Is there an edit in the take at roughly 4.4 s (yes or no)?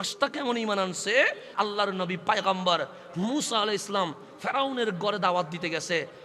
no